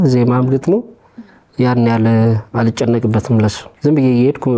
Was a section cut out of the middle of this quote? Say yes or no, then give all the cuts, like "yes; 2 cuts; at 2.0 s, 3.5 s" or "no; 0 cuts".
yes; 1 cut; at 3.7 s